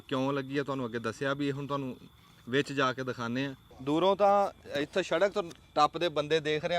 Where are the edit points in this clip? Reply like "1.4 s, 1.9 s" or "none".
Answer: 3.7 s